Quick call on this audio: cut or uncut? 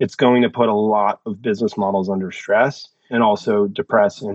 cut